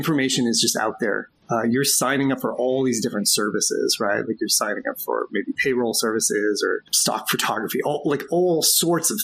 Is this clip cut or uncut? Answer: cut